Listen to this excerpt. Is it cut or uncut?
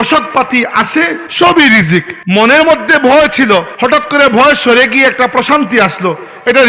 cut